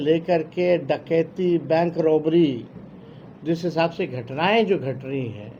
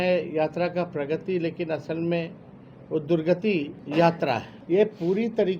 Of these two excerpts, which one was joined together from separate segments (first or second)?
second